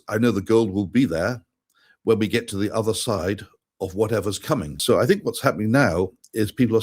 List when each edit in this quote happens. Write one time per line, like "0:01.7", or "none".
0:04.8